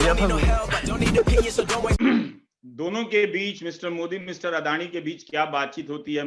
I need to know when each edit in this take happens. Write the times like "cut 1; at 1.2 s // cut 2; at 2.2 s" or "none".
cut 1; at 2.0 s